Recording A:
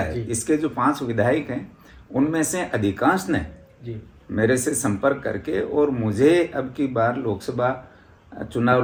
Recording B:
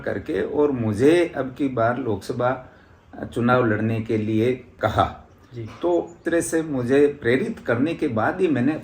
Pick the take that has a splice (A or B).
B